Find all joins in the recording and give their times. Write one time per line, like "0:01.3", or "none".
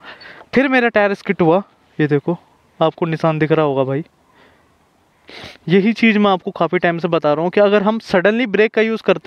none